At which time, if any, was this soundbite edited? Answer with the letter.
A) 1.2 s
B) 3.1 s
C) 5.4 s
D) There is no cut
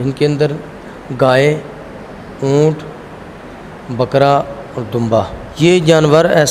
C